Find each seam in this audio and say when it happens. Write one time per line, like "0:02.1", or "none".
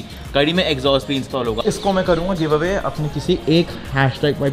0:01.6